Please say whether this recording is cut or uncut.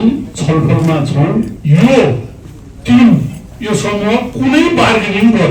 cut